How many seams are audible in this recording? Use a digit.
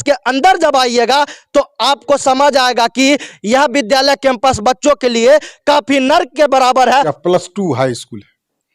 1